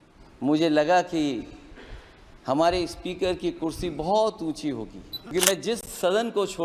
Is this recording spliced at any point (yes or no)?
yes